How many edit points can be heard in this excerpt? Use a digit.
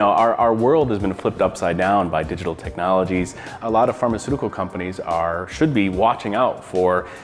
1